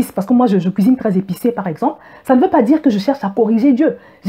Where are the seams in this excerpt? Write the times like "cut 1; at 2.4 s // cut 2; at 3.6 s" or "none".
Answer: none